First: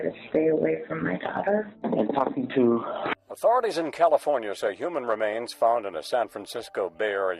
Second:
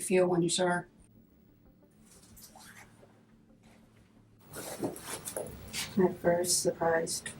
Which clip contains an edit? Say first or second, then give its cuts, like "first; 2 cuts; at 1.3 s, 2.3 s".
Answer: first; 1 cut; at 3.1 s